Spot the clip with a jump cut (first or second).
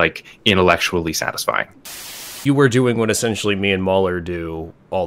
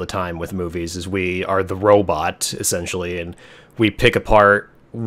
first